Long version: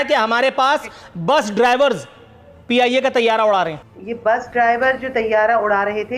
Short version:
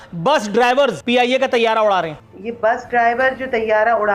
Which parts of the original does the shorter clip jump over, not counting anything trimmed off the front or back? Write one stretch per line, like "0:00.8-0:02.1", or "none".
0:02.0-0:02.6